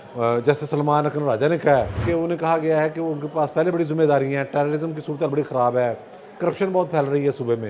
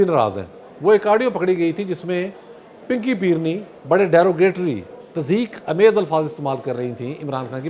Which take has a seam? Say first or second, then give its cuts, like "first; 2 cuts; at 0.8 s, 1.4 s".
first; 1 cut; at 2.0 s